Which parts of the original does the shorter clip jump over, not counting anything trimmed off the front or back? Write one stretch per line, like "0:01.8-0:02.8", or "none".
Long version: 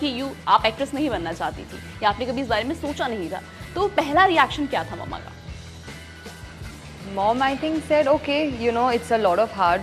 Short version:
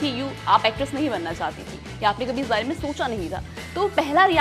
none